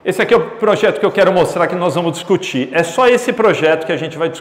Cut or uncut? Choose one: uncut